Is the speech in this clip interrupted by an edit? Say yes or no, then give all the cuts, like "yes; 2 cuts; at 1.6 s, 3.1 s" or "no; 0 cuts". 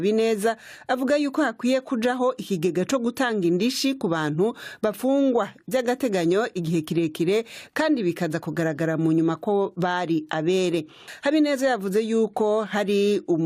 yes; 1 cut; at 11.0 s